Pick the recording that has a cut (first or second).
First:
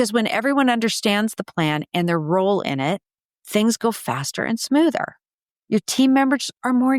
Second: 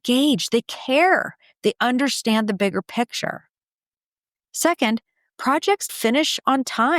second